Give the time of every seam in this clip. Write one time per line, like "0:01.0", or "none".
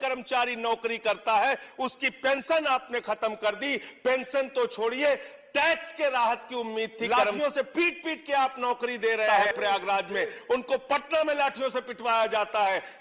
0:07.0
0:09.3